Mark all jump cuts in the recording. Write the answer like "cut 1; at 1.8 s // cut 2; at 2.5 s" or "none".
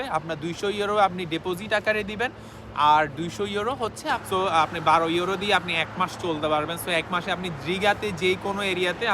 cut 1; at 4.2 s